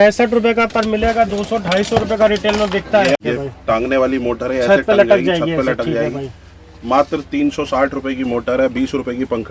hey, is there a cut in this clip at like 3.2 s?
yes; 1 cut; at 3.2 s

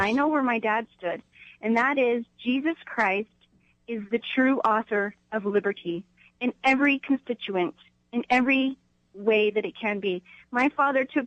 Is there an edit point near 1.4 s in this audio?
no; 0 cuts

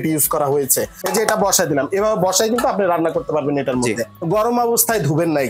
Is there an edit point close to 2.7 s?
no; 2 cuts; at 1.0 s, 4.1 s

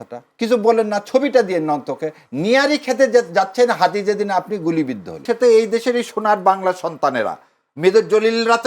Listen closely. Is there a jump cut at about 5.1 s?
yes; 1 cut; at 5.1 s

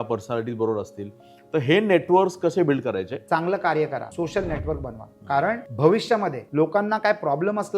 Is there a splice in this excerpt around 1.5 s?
no; 4 cuts; at 3.1 s, 4.1 s, 5.7 s, 6.4 s

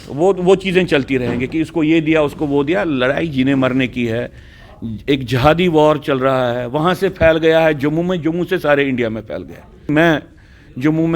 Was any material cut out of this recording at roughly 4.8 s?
no; 1 cut; at 9.9 s

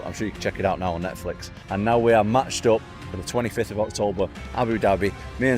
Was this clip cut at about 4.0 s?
no; 1 cut; at 1.6 s

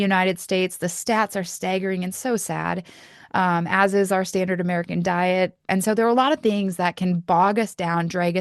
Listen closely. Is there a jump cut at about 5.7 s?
yes; 1 cut; at 5.7 s

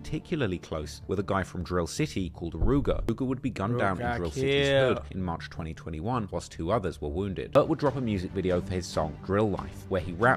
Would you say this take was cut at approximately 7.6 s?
yes; 2 cuts; at 3.1 s, 7.6 s

